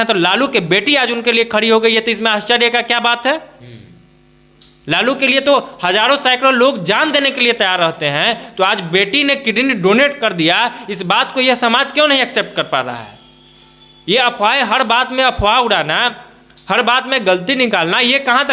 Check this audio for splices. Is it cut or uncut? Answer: uncut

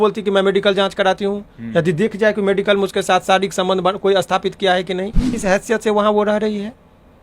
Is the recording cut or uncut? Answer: cut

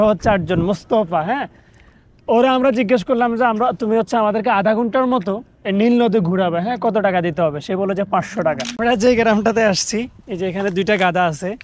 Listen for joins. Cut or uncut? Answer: cut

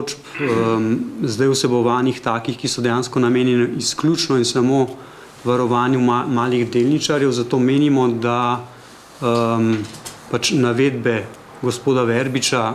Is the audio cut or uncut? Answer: uncut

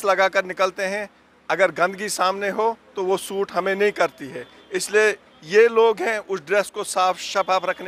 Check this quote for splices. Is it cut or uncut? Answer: uncut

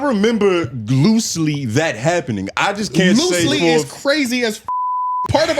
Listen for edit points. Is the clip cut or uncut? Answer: cut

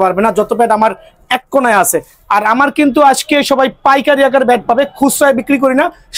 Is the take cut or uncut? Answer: uncut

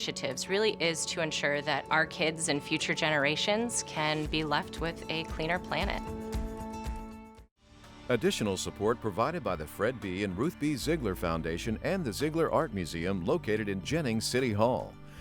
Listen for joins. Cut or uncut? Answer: cut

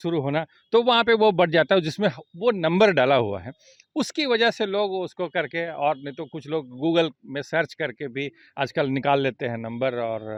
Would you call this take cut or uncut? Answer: uncut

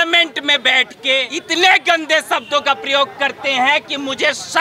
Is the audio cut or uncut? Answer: cut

